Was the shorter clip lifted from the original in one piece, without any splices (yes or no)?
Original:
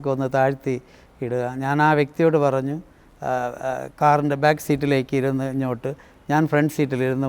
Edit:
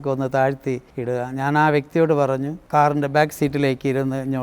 no